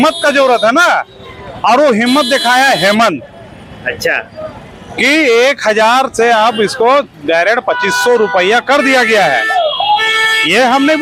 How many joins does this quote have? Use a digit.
0